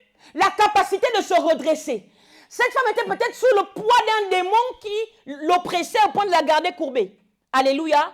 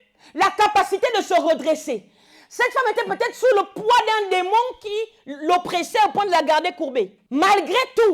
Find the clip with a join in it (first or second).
second